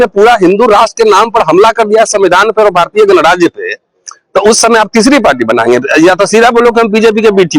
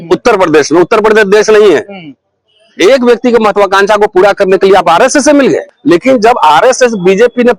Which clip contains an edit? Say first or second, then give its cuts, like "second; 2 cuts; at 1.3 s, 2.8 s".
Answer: second; 1 cut; at 5.7 s